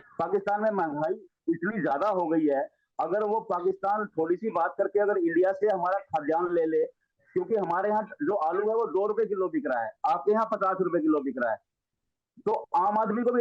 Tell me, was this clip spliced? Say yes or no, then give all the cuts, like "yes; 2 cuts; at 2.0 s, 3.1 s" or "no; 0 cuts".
no; 0 cuts